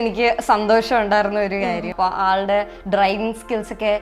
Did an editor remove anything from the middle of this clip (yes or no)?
yes